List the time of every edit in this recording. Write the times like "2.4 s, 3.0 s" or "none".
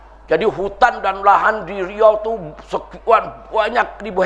none

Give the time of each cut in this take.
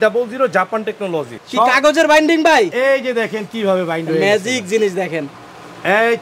1.4 s

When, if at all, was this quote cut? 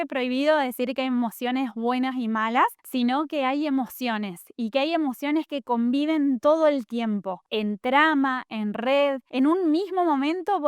7.4 s, 9.2 s

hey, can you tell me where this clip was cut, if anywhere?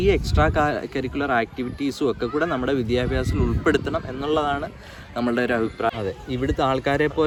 none

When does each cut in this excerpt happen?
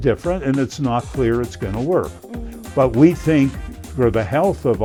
none

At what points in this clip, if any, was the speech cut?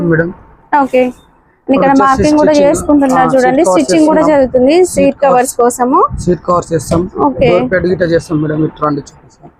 none

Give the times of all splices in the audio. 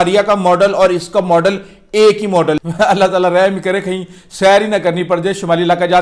2.6 s

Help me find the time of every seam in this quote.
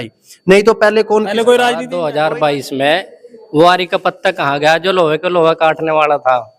1.9 s

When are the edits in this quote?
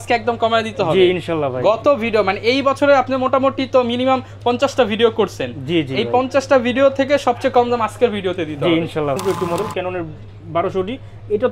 9.2 s

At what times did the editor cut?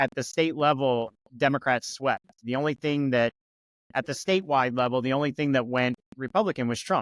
none

